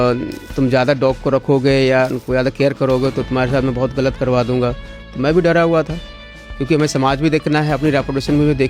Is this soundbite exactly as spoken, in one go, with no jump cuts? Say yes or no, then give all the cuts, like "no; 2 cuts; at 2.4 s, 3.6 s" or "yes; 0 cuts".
yes; 0 cuts